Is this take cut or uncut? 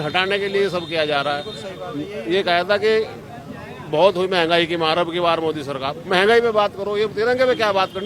uncut